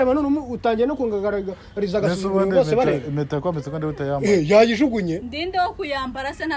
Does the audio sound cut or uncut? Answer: uncut